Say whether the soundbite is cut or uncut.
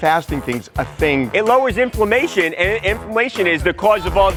uncut